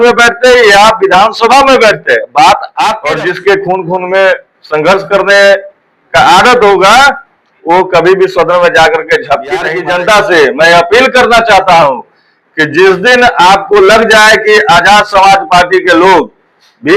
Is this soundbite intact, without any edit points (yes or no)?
no